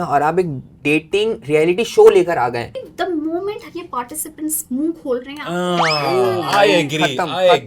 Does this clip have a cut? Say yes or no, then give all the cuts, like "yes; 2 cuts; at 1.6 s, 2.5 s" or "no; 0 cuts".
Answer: yes; 1 cut; at 2.9 s